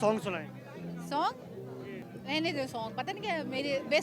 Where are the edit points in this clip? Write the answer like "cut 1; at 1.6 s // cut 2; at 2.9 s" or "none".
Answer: cut 1; at 2.0 s